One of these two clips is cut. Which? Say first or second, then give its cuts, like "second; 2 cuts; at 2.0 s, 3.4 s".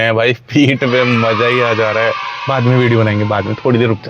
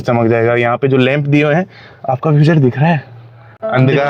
first; 1 cut; at 2.3 s